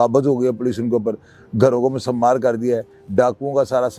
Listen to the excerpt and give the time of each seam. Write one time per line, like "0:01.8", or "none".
none